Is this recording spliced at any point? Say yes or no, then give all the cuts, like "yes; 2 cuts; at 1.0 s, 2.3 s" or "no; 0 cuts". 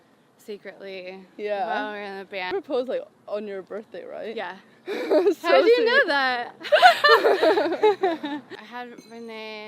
yes; 2 cuts; at 2.5 s, 8.6 s